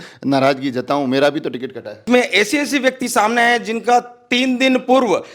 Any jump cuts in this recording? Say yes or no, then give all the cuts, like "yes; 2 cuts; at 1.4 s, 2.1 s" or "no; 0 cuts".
yes; 1 cut; at 2.0 s